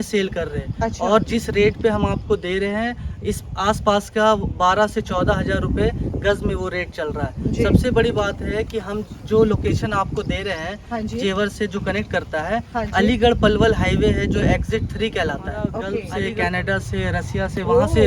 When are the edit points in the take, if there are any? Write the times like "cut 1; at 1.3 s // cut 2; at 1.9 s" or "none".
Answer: cut 1; at 16.0 s